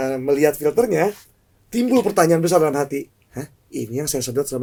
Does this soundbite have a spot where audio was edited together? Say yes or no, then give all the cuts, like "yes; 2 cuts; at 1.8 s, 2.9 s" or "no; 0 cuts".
no; 0 cuts